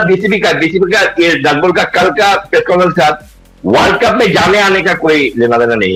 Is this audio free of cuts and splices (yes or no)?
yes